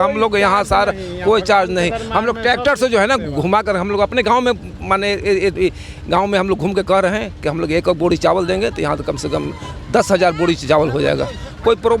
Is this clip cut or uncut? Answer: uncut